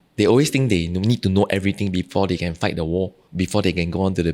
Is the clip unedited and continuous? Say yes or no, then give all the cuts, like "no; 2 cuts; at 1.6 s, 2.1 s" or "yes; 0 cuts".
no; 1 cut; at 3.2 s